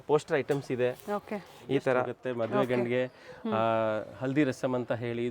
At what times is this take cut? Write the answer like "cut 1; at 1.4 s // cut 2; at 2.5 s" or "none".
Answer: cut 1; at 2.2 s